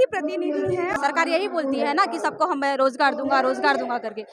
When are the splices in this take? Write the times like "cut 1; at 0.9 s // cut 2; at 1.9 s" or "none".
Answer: cut 1; at 0.9 s